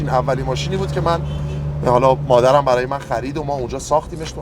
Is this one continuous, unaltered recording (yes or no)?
yes